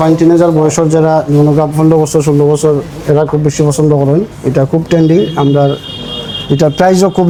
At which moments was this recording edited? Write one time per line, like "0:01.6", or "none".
none